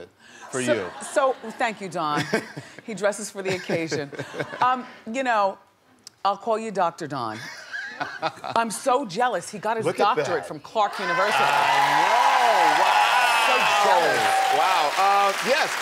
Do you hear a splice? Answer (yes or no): no